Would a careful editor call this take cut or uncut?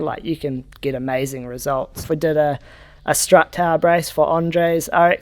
cut